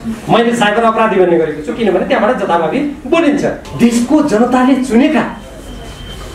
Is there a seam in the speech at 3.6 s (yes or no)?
yes